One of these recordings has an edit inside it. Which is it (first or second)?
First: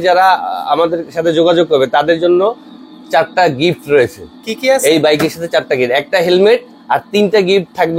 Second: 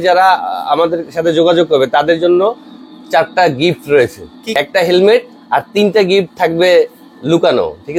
second